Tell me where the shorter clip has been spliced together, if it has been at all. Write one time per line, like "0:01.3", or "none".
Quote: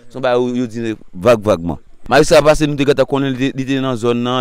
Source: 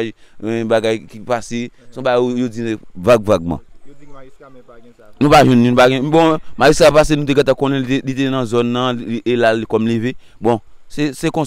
0:02.0